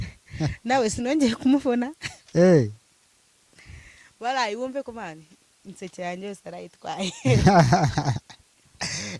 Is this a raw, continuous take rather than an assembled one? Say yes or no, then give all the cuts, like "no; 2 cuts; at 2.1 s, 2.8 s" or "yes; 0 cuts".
yes; 0 cuts